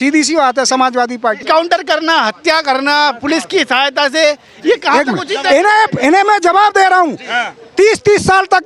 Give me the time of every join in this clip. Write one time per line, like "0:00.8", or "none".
0:01.4